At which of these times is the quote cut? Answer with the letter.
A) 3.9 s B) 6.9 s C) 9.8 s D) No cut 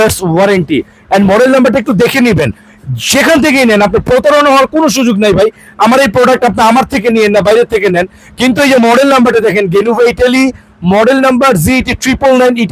D